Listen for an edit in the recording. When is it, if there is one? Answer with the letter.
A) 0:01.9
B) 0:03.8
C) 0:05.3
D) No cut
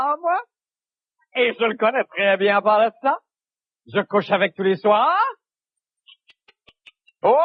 D